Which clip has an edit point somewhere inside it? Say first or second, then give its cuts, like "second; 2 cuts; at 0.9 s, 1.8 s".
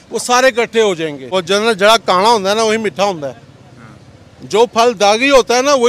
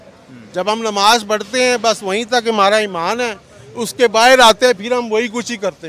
first; 1 cut; at 1.3 s